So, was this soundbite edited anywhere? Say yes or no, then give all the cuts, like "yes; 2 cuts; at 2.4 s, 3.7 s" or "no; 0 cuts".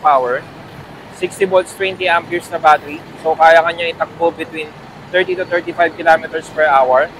no; 0 cuts